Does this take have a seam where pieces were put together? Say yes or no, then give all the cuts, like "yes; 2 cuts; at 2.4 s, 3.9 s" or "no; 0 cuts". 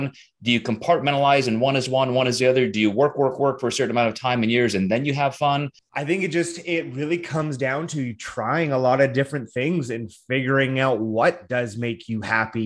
yes; 1 cut; at 5.8 s